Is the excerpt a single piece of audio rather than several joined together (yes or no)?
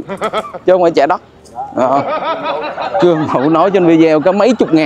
yes